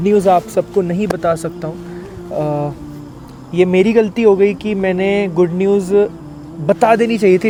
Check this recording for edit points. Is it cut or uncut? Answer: uncut